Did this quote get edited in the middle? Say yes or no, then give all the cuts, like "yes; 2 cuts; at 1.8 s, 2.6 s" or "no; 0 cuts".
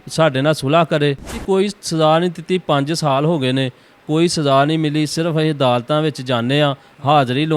yes; 1 cut; at 1.4 s